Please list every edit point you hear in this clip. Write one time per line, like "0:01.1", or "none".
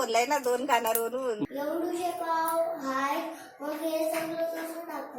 0:01.5